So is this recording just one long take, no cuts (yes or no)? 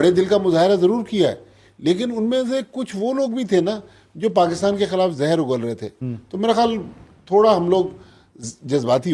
yes